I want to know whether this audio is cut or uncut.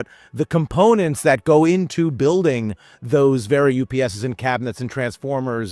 uncut